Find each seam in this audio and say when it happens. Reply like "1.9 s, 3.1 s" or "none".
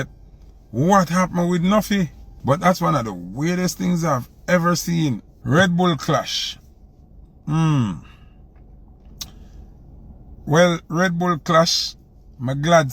2.3 s, 5.3 s